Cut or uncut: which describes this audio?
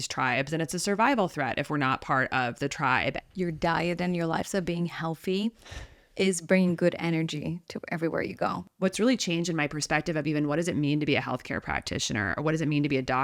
cut